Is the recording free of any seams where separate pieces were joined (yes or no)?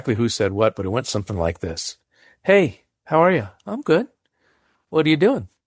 yes